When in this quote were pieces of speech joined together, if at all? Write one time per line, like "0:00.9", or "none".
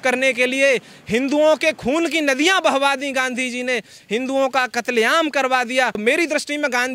0:06.0